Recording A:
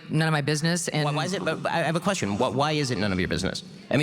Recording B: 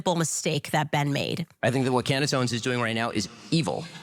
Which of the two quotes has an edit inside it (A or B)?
B